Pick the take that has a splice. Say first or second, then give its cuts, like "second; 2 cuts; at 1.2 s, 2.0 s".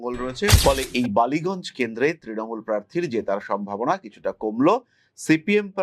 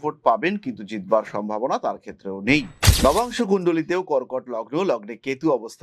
second; 1 cut; at 2.8 s